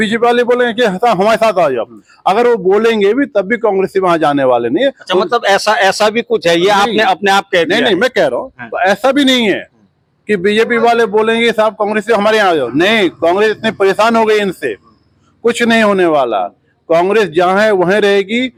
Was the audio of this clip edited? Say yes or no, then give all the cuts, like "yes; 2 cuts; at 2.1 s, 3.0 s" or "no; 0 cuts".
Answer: no; 0 cuts